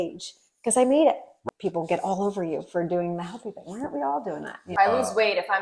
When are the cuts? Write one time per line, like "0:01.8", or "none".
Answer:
0:01.3
0:04.7